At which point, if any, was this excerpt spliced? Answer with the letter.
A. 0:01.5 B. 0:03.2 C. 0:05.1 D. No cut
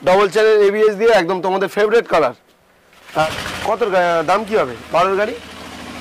B